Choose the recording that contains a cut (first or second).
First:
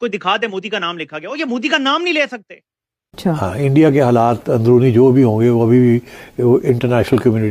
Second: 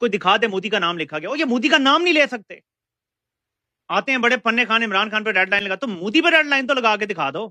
first